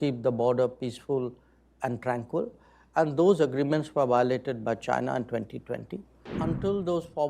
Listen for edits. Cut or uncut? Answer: cut